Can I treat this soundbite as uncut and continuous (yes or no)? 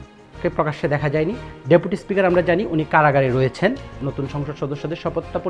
no